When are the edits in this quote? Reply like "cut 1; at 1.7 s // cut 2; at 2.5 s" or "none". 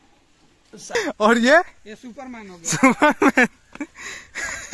cut 1; at 0.9 s